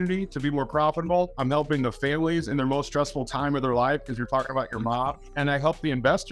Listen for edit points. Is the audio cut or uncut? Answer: cut